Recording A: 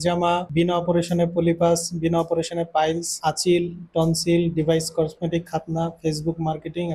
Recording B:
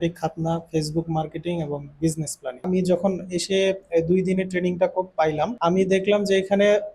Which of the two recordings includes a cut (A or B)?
B